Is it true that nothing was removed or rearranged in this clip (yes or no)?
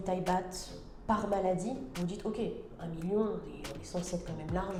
yes